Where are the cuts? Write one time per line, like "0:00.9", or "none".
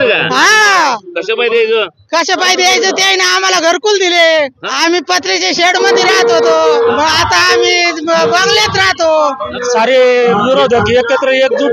0:04.6
0:06.9
0:09.5